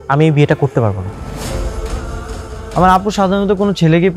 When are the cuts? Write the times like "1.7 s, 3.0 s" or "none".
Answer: 1.1 s, 2.7 s